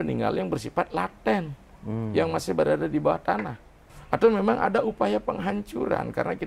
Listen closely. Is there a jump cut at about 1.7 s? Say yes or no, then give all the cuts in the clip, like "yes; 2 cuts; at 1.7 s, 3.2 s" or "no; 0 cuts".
no; 1 cut; at 3.9 s